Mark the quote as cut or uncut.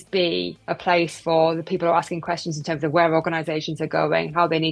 uncut